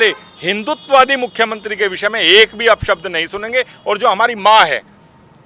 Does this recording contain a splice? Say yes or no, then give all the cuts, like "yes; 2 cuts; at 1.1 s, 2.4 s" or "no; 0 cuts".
no; 0 cuts